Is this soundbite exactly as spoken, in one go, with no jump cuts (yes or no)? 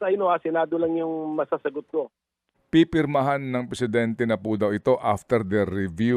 no